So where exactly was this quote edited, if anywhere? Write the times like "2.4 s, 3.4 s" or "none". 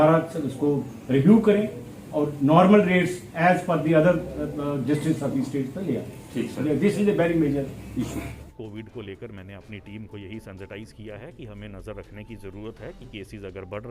8.4 s